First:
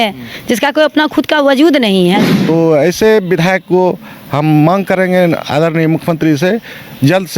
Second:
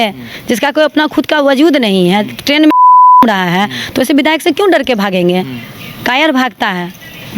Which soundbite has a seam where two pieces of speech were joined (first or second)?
first